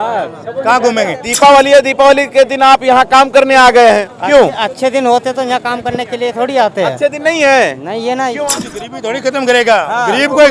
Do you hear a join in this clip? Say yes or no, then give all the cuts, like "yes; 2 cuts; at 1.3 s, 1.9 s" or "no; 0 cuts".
yes; 3 cuts; at 1.2 s, 4.1 s, 8.4 s